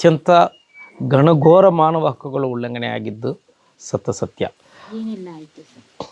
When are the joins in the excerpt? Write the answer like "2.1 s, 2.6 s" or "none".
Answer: none